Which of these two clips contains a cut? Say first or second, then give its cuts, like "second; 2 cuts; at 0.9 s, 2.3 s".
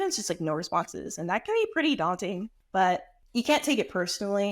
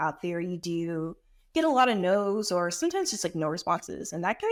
first; 2 cuts; at 2.5 s, 3.2 s